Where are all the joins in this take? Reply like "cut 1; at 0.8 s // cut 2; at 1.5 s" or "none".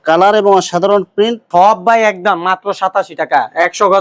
cut 1; at 1.4 s

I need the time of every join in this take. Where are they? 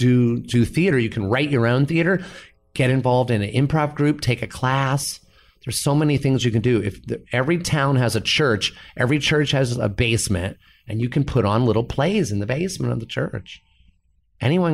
none

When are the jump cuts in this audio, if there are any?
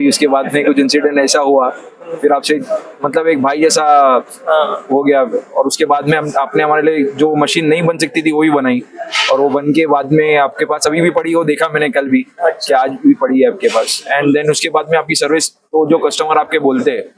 none

